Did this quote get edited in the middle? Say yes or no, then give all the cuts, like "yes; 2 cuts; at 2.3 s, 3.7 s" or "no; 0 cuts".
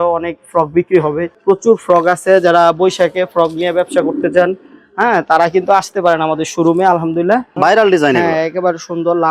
yes; 2 cuts; at 1.3 s, 7.6 s